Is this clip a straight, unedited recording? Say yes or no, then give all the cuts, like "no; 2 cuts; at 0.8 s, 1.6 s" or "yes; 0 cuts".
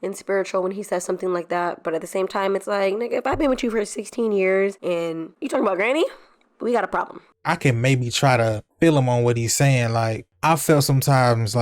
no; 1 cut; at 7.2 s